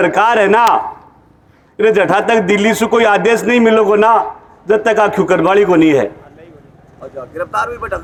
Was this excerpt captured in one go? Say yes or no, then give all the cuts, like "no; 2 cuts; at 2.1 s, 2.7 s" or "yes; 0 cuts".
yes; 0 cuts